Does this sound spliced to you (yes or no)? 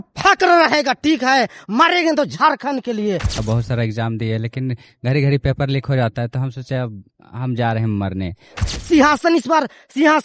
yes